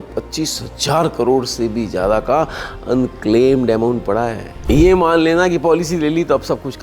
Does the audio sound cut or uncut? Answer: cut